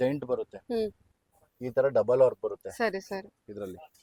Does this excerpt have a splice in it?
no; 0 cuts

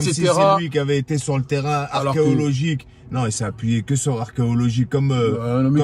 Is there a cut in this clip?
no; 0 cuts

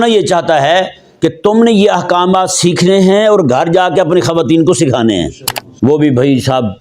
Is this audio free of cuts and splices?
no; 1 cut; at 5.6 s

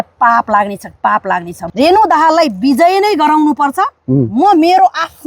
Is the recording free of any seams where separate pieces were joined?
no; 1 cut; at 1.6 s

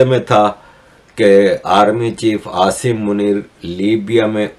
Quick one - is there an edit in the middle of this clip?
no; 0 cuts

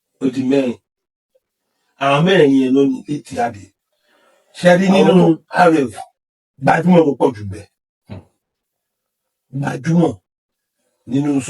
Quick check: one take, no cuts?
no; 1 cut; at 3.3 s

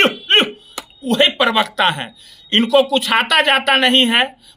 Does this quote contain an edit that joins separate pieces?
no; 0 cuts

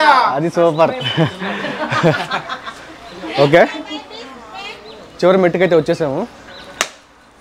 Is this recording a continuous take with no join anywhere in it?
yes; 0 cuts

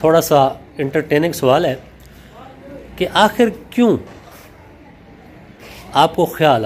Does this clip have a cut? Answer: no; 0 cuts

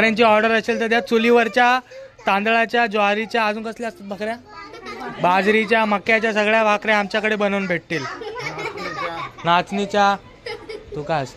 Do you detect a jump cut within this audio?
no; 0 cuts

